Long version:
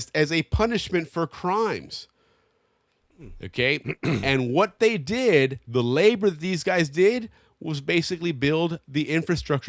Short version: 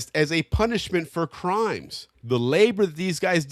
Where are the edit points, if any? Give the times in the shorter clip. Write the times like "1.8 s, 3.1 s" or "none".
2.2 s